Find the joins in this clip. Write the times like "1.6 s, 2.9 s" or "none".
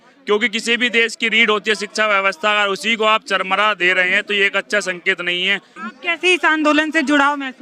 5.8 s